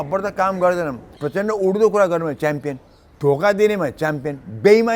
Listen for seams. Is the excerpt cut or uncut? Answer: cut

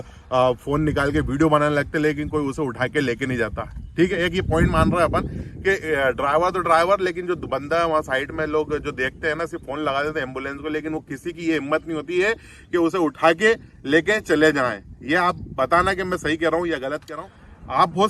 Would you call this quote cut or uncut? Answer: cut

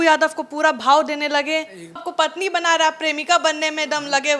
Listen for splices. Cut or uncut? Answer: cut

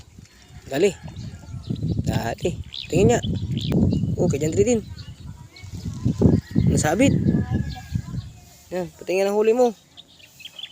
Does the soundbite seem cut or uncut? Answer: cut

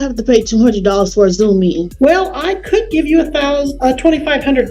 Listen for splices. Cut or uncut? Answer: cut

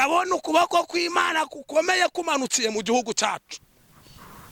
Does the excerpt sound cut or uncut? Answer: uncut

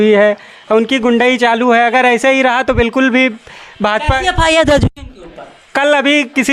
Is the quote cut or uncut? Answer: uncut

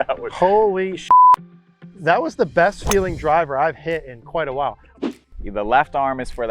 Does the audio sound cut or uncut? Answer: cut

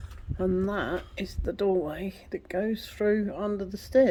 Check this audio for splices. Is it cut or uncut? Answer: uncut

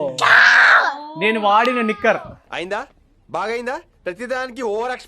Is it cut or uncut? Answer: uncut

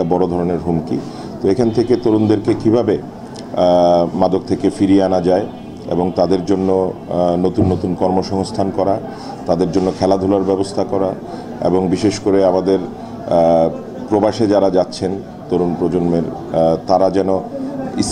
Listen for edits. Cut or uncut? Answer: uncut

